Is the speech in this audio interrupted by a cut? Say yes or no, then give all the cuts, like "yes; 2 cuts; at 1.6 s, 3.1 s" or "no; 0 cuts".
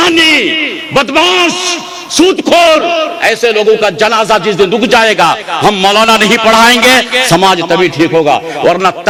no; 0 cuts